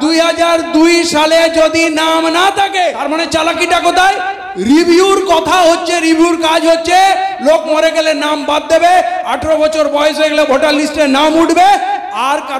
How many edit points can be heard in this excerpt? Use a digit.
1